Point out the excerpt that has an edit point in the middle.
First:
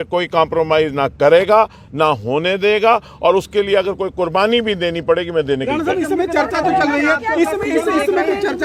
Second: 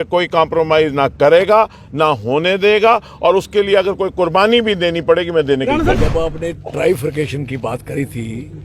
second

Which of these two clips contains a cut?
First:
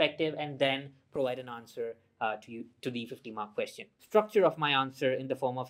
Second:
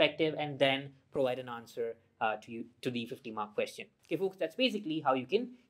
first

